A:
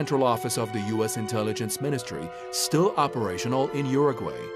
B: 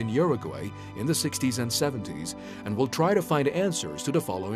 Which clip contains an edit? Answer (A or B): B